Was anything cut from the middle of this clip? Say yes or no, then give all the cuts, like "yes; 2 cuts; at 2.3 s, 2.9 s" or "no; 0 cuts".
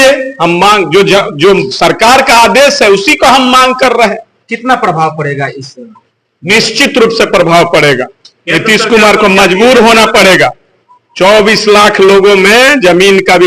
no; 0 cuts